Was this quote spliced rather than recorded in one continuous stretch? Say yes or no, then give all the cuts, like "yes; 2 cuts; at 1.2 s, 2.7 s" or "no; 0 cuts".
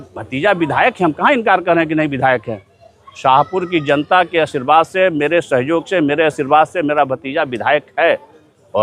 no; 0 cuts